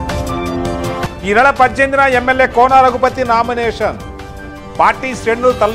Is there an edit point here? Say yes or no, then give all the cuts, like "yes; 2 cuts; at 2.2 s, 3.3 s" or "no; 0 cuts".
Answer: yes; 1 cut; at 0.9 s